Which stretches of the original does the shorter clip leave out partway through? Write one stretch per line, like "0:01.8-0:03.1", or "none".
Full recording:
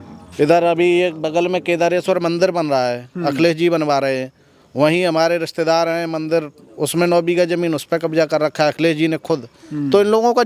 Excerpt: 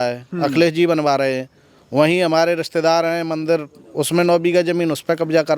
none